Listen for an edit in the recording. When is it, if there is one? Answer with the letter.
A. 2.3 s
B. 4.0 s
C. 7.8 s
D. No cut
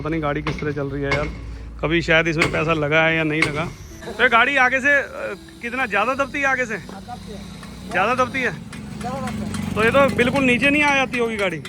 B